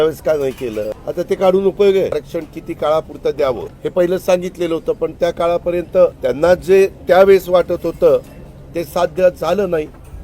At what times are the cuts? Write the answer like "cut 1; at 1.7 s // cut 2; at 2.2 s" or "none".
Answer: cut 1; at 1.0 s // cut 2; at 2.2 s // cut 3; at 3.7 s // cut 4; at 6.2 s